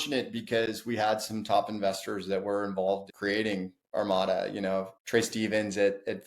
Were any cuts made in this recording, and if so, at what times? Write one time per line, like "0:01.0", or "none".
0:03.1